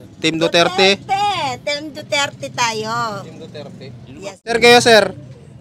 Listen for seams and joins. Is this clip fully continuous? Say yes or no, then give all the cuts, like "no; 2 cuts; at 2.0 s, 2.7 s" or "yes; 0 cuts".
no; 1 cut; at 4.5 s